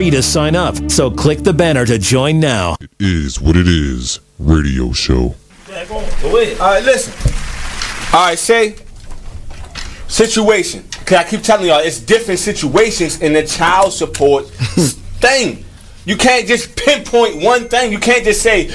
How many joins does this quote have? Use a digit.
1